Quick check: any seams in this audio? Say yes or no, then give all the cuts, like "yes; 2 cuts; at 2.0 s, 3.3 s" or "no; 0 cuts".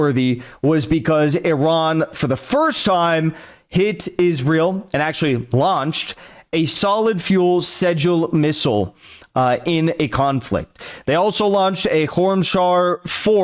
no; 0 cuts